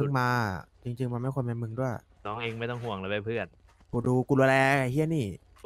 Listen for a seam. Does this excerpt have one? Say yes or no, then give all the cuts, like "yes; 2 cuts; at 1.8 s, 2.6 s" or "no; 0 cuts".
yes; 1 cut; at 2.1 s